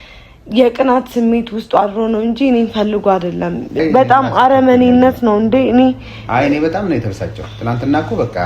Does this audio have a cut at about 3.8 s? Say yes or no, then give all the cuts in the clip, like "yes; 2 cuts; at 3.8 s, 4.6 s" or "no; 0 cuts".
yes; 1 cut; at 3.8 s